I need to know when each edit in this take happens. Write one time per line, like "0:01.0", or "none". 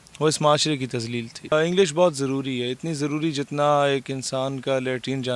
0:01.5